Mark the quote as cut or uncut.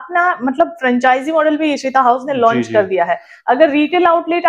uncut